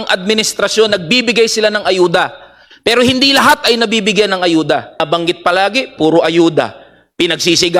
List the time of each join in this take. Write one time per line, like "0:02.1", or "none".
0:05.0